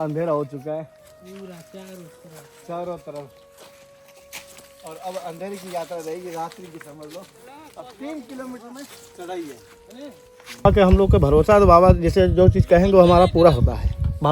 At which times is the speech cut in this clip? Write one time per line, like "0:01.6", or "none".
0:10.6